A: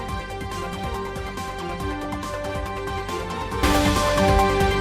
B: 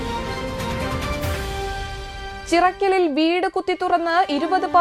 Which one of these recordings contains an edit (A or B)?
A